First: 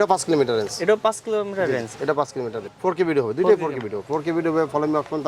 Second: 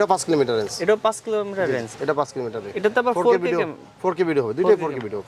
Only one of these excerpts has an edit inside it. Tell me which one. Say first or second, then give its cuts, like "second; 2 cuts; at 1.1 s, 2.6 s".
first; 1 cut; at 2.6 s